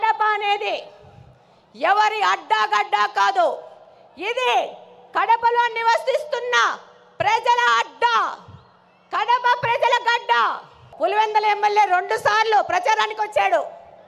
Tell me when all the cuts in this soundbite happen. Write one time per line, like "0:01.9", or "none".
0:10.9

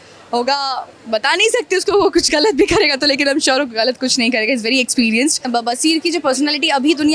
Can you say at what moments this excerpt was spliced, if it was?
0:05.5

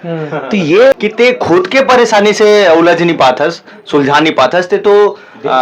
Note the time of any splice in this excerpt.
0:00.9

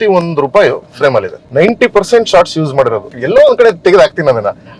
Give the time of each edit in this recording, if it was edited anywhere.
0:01.4
0:03.2

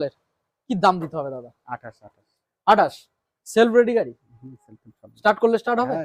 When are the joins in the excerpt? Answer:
none

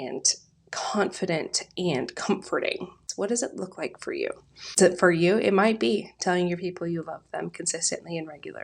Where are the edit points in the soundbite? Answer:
0:03.0
0:04.8

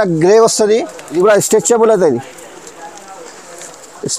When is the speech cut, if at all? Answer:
0:01.1

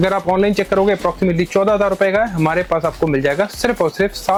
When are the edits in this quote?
none

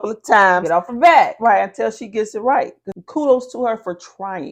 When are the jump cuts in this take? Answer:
0:02.8

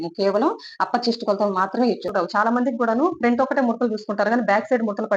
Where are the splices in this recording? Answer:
0:02.1

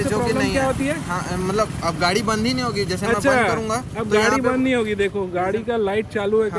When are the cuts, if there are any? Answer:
none

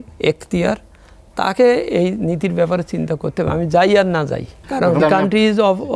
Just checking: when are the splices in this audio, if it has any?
0:05.0

